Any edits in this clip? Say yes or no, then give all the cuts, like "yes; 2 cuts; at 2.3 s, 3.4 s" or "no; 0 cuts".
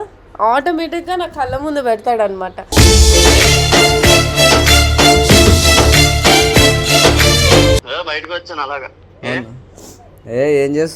yes; 1 cut; at 8.0 s